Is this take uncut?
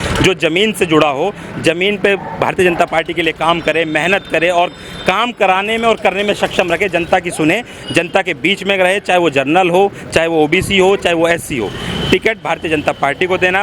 yes; 0 cuts

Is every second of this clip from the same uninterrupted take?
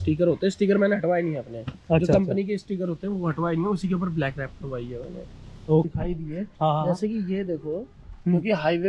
no; 1 cut; at 5.9 s

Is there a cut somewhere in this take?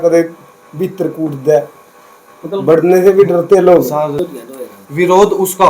yes; 1 cut; at 4.2 s

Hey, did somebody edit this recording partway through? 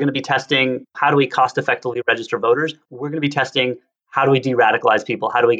yes; 1 cut; at 1.0 s

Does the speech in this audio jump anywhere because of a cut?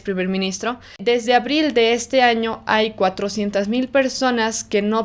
yes; 1 cut; at 1.0 s

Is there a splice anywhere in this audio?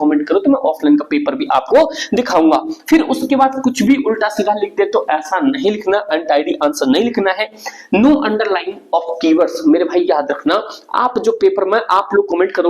no; 0 cuts

